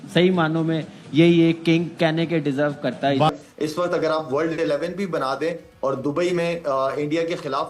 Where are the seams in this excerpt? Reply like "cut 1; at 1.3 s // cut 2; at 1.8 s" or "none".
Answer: cut 1; at 3.3 s